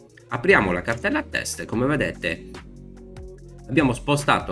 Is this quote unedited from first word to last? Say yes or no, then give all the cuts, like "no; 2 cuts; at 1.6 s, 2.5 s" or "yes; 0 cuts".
no; 2 cuts; at 2.4 s, 3.7 s